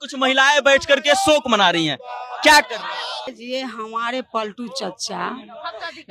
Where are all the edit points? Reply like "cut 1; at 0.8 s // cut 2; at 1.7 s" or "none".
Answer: cut 1; at 3.3 s

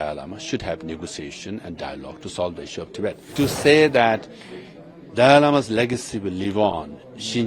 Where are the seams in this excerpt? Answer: cut 1; at 3.2 s

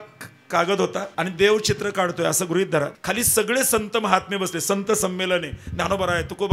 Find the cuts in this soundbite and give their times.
cut 1; at 1.1 s // cut 2; at 2.9 s

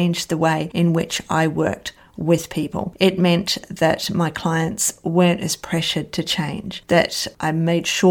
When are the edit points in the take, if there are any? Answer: none

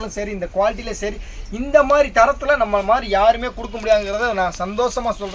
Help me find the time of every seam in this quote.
none

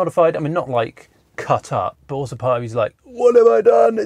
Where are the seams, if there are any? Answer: cut 1; at 2.0 s

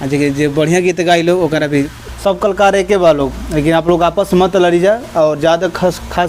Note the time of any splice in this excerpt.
cut 1; at 2.0 s

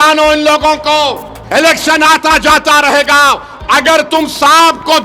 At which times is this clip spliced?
cut 1; at 1.3 s // cut 2; at 3.5 s

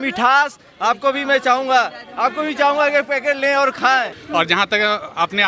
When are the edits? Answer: cut 1; at 4.2 s

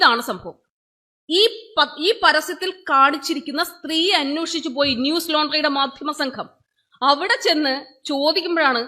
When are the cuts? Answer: none

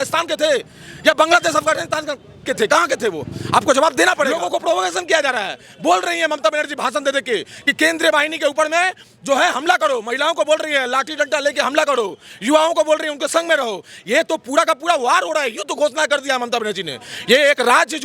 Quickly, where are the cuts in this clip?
cut 1; at 4.4 s

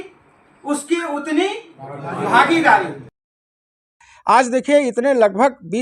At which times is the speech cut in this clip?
cut 1; at 3.7 s

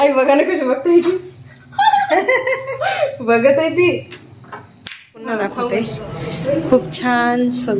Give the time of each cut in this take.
cut 1; at 5.5 s

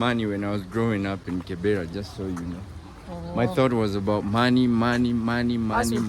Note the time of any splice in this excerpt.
none

